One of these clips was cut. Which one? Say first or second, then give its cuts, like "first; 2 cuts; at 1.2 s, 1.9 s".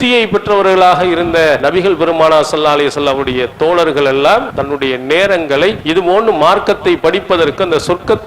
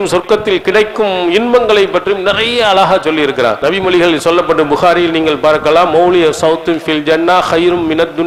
first; 3 cuts; at 1.6 s, 4.5 s, 5.8 s